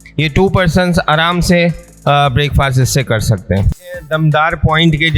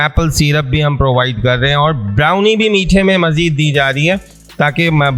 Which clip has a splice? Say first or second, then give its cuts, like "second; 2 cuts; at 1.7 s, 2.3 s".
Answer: first; 1 cut; at 4.0 s